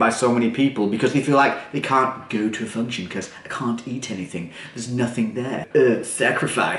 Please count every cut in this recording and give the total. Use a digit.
1